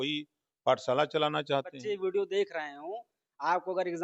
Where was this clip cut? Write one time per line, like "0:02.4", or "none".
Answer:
0:01.7